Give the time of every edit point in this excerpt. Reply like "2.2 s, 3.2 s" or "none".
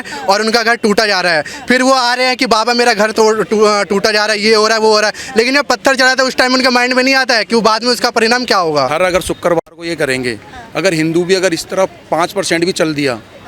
8.9 s

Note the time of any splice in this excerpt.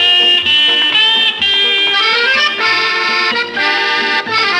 none

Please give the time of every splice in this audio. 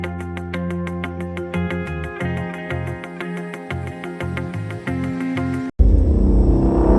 5.7 s

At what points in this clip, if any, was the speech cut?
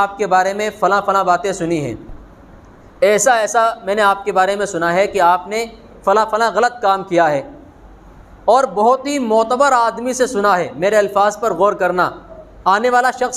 none

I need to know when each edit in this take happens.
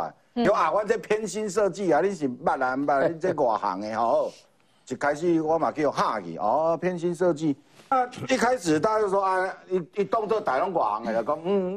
7.9 s

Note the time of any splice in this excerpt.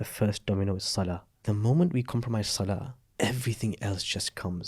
1.3 s, 3.0 s

